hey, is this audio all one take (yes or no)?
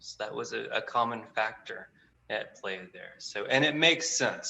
yes